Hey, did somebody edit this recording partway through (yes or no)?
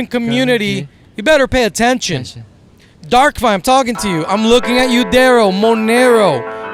no